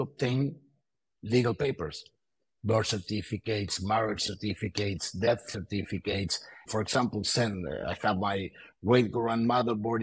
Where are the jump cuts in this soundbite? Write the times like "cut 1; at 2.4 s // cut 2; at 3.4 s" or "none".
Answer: cut 1; at 6.6 s